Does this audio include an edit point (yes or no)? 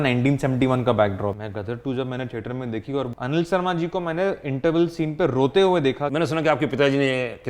yes